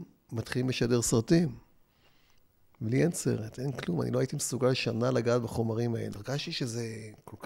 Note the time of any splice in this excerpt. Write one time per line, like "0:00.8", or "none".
0:06.2